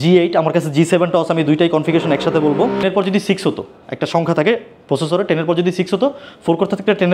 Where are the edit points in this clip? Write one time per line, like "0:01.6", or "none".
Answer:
0:02.8